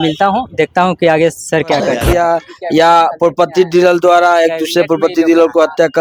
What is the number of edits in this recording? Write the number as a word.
one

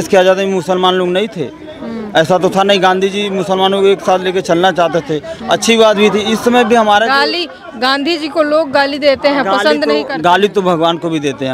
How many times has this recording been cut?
zero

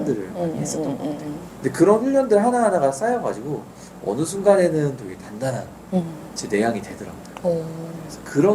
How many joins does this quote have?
zero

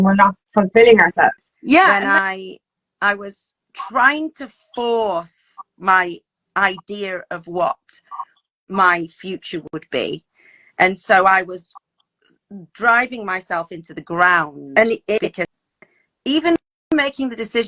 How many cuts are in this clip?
two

